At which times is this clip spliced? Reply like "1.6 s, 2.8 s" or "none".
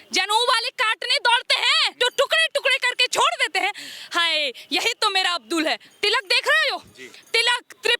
1.9 s, 5.9 s